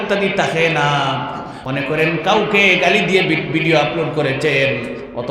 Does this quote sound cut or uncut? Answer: cut